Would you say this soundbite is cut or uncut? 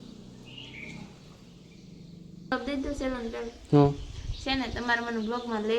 cut